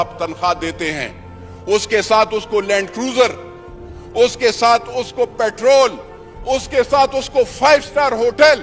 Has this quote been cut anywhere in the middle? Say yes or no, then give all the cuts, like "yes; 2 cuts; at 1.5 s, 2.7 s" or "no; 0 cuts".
no; 0 cuts